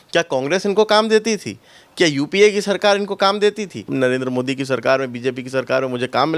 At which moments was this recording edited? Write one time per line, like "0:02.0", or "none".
0:03.9